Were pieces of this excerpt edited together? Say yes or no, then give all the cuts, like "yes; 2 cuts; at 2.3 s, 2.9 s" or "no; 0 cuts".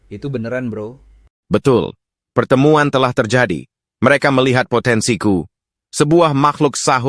no; 0 cuts